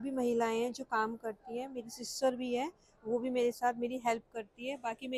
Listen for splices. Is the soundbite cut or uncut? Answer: uncut